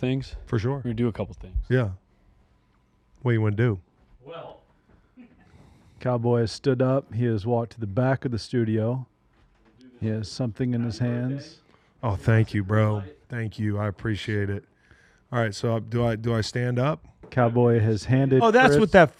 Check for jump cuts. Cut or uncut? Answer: uncut